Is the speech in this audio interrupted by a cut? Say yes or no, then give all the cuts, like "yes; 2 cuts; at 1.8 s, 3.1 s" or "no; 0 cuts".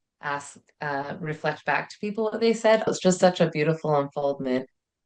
yes; 1 cut; at 2.9 s